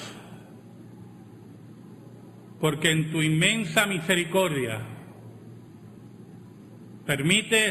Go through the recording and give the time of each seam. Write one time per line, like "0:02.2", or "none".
0:06.5